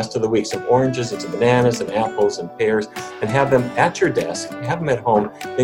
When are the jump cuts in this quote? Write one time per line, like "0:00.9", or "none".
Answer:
none